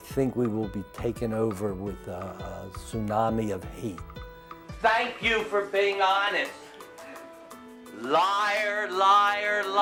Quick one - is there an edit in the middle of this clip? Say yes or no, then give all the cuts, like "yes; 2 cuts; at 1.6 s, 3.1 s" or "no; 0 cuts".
no; 0 cuts